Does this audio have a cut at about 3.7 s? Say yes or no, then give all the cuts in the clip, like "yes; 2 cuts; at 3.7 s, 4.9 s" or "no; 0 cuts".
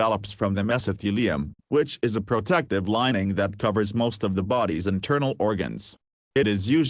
no; 1 cut; at 6.0 s